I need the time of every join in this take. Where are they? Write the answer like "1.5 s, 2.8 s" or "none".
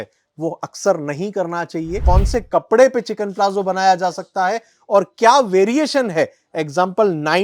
2.0 s